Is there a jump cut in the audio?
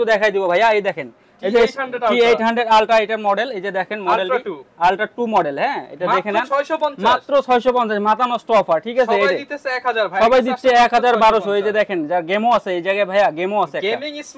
no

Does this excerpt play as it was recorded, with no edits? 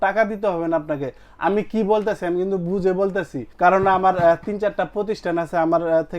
no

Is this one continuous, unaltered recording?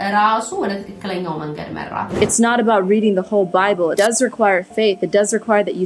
no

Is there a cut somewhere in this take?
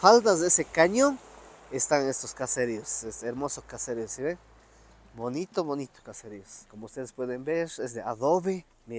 no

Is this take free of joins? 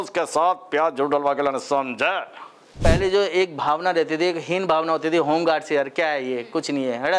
no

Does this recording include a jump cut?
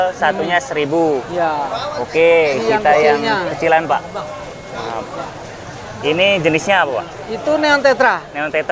no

